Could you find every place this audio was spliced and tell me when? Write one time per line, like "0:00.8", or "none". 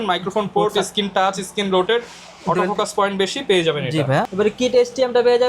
0:04.3